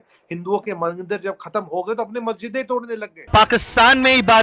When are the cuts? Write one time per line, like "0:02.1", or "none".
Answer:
0:03.3

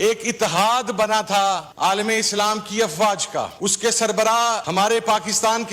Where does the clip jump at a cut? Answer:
0:01.7
0:03.5
0:04.6

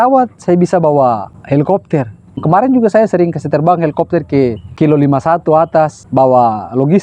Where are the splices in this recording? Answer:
0:01.3
0:02.3
0:04.6
0:06.0

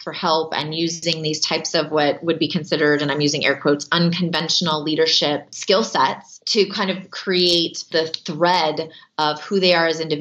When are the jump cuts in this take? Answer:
0:05.5
0:06.3
0:07.8

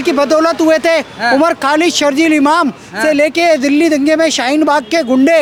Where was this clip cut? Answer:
none

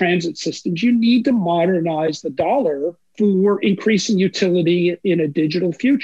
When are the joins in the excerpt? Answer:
0:03.0

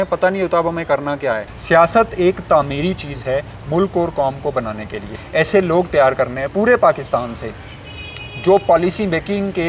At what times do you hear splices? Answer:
0:01.5
0:05.2

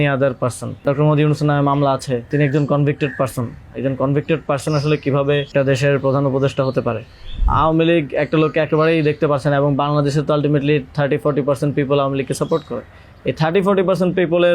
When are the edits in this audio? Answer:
0:00.8
0:02.3
0:05.5
0:07.4

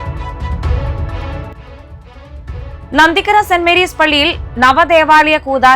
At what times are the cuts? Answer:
0:02.8

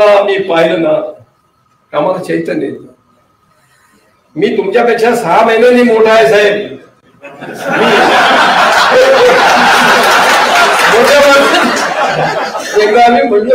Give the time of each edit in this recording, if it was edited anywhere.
none

